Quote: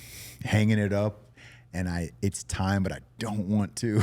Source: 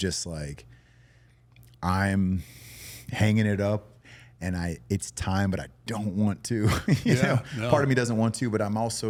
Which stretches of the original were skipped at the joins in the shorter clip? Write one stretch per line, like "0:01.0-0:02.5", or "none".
none